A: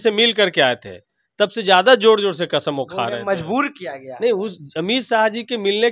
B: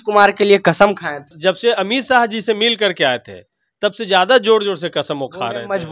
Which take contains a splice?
B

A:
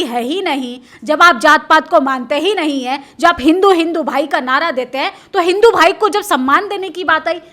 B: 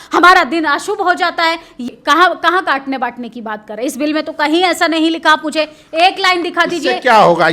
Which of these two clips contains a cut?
B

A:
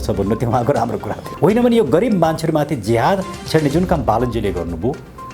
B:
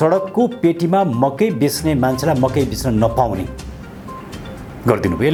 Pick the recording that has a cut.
A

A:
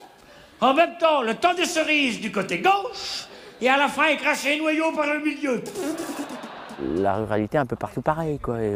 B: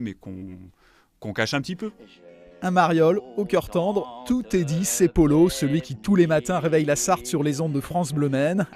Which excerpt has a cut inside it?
B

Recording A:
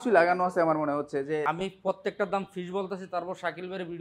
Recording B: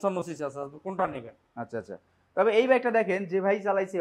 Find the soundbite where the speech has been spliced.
A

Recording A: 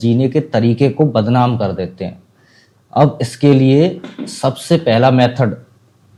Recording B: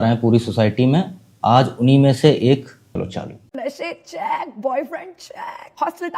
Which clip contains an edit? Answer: B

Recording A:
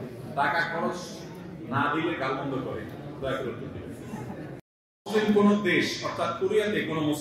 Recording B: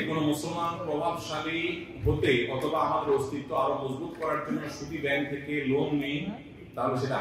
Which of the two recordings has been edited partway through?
A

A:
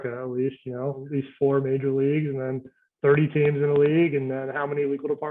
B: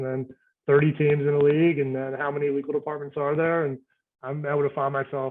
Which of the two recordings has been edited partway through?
A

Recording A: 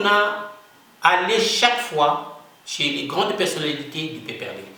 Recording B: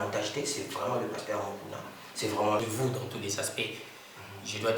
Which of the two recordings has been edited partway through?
B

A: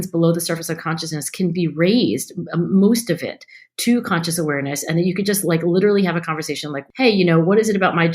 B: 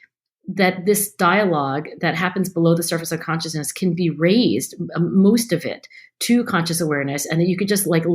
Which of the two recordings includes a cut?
A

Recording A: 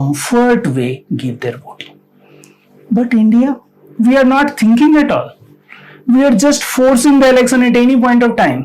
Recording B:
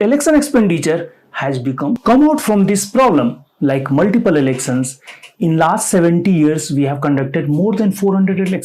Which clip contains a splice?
B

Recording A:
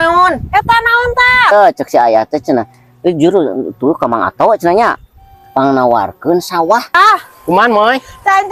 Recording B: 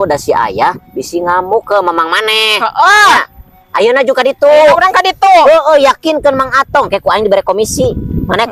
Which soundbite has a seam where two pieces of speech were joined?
A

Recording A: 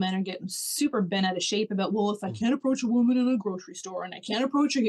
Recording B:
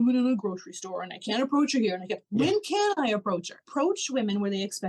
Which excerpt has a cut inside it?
B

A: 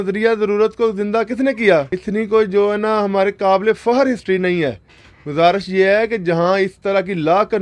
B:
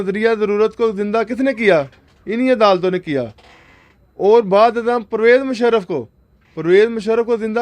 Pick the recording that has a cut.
A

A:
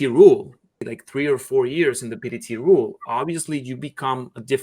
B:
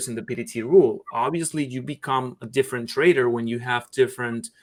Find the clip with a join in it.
A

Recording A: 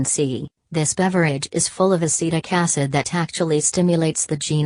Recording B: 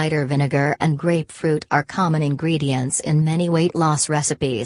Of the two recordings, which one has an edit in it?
B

